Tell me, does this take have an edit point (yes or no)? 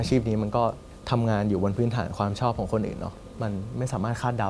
yes